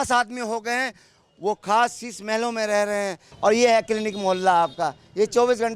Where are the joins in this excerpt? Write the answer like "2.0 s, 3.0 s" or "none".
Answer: 3.2 s